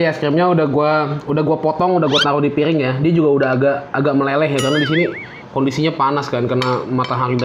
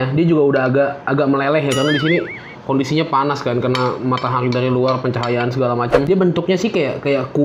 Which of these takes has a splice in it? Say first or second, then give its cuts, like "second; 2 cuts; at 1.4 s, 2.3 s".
second; 1 cut; at 6.1 s